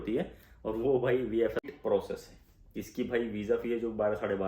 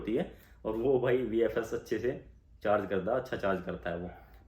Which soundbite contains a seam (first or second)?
first